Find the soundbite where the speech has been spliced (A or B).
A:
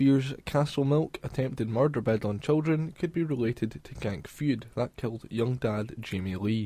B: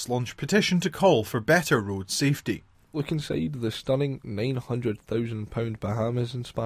B